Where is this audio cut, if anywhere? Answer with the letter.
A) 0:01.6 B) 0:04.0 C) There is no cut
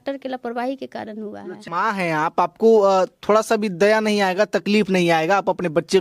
A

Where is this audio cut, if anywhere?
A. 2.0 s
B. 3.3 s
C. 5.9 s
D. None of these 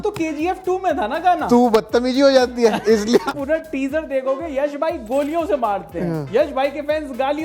B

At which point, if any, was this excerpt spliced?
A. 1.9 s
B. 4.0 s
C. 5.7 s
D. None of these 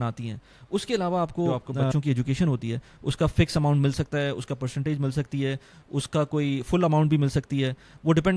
A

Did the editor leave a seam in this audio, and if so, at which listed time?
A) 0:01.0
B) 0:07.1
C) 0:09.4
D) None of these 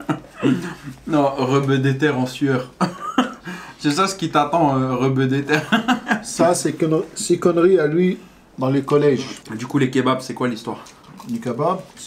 C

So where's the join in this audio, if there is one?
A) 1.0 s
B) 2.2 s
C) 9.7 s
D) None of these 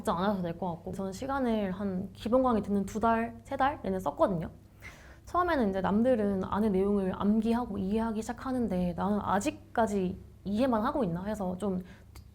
A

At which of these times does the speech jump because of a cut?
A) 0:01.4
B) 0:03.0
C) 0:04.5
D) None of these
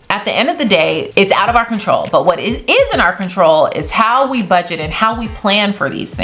D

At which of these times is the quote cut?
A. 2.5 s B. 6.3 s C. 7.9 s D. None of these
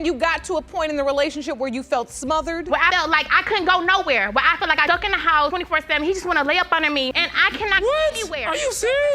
D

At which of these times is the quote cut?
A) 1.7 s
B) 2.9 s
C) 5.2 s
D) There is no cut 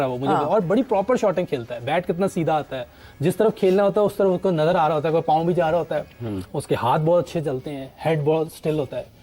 D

